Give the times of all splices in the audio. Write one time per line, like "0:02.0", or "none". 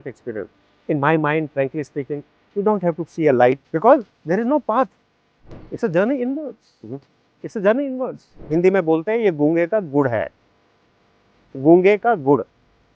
0:03.6
0:08.3